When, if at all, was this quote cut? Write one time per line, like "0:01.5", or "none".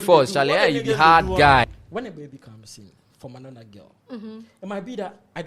0:01.7